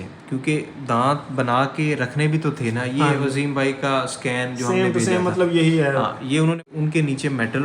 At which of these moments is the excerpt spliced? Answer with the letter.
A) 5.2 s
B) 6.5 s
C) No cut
B